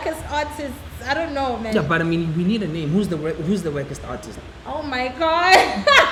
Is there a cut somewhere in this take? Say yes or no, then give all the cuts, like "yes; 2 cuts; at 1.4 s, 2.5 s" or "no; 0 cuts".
no; 0 cuts